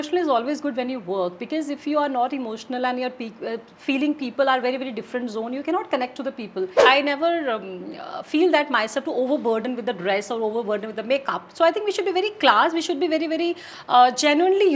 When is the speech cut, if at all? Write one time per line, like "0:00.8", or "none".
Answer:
0:06.8